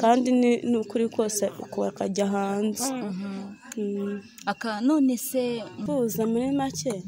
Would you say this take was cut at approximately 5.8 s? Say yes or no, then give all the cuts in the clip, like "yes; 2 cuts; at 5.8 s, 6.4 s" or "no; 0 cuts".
yes; 1 cut; at 5.8 s